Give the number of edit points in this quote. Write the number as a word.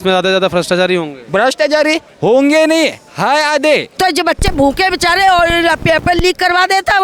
one